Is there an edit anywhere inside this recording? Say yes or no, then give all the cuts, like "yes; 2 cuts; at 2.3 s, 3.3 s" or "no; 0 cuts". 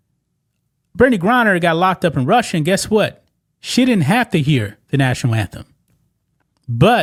no; 0 cuts